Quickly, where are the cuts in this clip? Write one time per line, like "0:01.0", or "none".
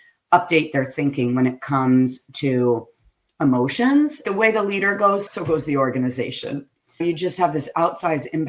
0:04.2
0:05.3
0:07.0